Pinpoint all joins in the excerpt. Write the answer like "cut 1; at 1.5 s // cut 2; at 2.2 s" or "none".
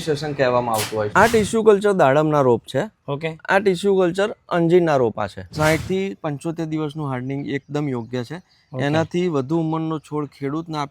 cut 1; at 1.1 s // cut 2; at 5.4 s